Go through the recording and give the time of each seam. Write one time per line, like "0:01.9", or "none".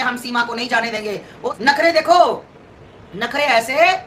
0:01.5